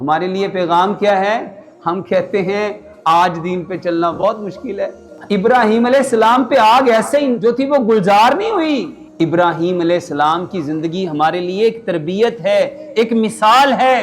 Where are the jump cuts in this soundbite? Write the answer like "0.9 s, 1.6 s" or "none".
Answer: 5.1 s, 9.0 s